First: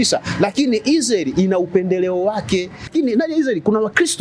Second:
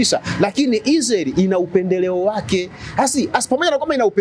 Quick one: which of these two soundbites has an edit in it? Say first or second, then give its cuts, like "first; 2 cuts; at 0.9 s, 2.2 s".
first; 1 cut; at 2.9 s